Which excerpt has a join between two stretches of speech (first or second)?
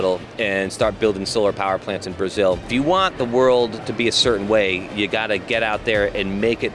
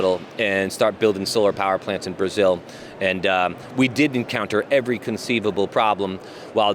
first